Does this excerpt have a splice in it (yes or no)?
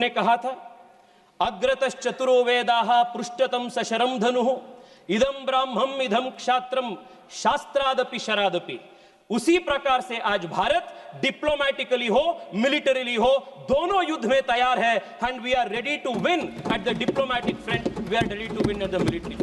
no